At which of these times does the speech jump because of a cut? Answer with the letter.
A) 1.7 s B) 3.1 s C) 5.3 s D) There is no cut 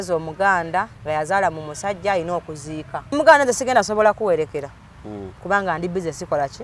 B